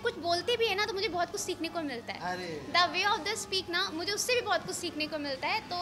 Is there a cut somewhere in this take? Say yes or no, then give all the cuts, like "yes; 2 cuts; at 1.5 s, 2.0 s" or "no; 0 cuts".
no; 0 cuts